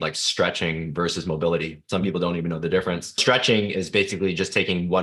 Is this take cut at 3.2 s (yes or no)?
yes